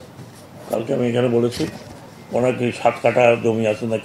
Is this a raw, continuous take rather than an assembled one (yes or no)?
yes